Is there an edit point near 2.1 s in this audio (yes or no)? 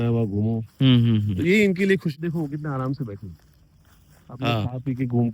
yes